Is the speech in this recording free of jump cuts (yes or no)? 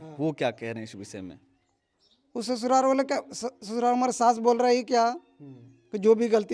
yes